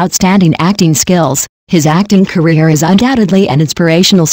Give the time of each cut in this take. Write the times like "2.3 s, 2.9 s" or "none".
1.7 s